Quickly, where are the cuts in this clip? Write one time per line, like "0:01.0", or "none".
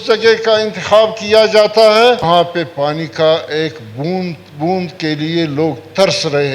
0:02.2